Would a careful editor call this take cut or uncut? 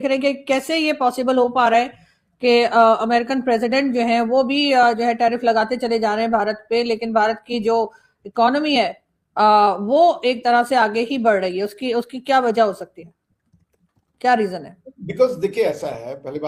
uncut